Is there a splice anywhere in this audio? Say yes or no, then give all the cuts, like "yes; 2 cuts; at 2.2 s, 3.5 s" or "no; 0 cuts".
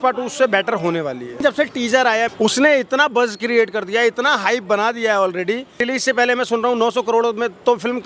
yes; 3 cuts; at 1.4 s, 2.3 s, 5.8 s